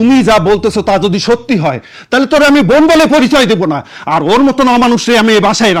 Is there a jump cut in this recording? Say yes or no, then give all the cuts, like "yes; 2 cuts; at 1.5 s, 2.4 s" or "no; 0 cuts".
no; 0 cuts